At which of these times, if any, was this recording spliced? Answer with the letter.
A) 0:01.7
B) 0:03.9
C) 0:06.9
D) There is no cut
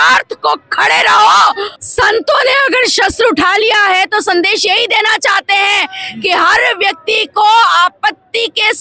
A